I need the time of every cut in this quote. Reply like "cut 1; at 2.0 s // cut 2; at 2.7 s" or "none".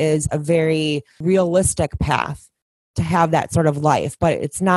cut 1; at 1.2 s